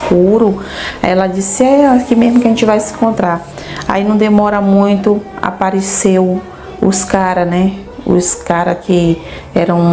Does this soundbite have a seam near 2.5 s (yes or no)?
no